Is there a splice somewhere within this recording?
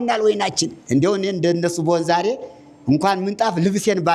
no; 0 cuts

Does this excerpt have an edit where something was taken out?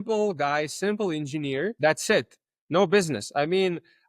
yes; 1 cut; at 1.7 s

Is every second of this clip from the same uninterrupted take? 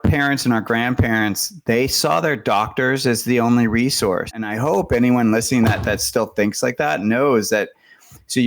no; 1 cut; at 4.3 s

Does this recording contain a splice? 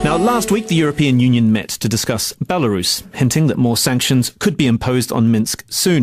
no; 0 cuts

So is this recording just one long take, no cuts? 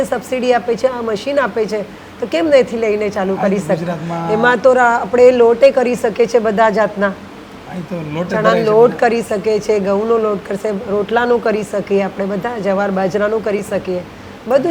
yes; 0 cuts

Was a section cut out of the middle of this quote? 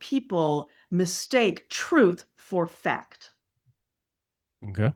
no; 0 cuts

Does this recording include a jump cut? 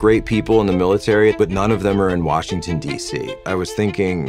yes; 2 cuts; at 1.3 s, 3.4 s

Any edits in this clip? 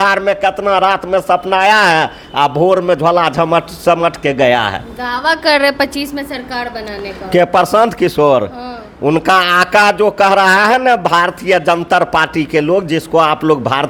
no; 0 cuts

